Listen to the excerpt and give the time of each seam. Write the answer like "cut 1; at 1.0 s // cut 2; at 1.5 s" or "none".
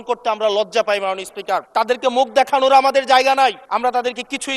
cut 1; at 1.7 s // cut 2; at 3.6 s